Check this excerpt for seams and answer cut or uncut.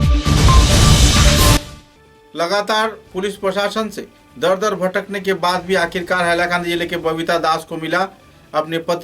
cut